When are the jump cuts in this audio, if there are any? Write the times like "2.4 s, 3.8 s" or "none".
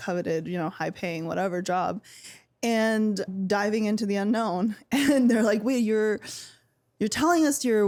none